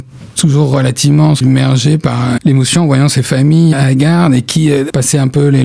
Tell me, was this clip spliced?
yes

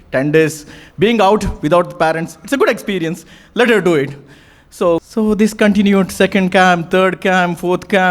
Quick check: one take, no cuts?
no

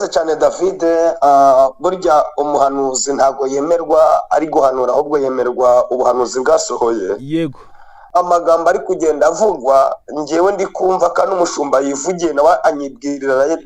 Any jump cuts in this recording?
yes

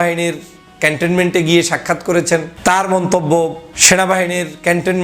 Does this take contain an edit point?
yes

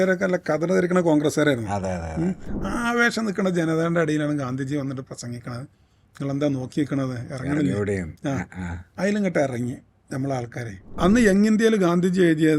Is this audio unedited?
no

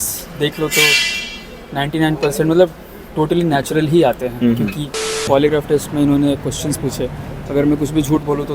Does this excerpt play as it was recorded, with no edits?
no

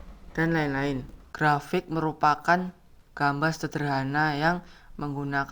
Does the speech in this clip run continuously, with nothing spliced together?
no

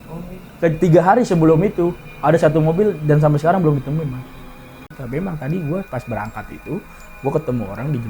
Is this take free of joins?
no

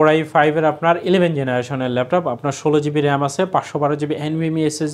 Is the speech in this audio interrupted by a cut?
no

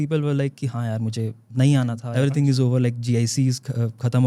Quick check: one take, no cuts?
no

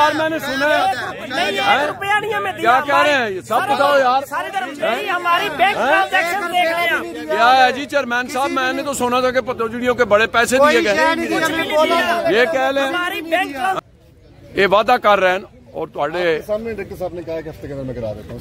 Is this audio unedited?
no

